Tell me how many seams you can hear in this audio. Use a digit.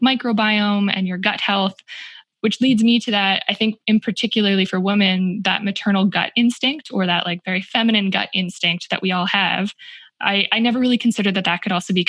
0